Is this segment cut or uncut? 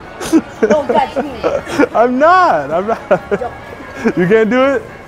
uncut